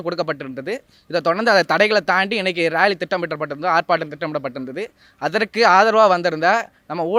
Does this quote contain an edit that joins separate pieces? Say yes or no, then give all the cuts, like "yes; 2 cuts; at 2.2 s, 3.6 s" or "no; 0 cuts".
no; 0 cuts